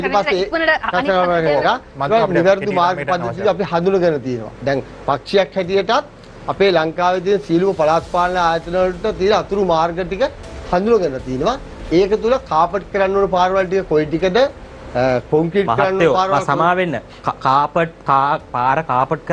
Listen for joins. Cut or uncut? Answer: uncut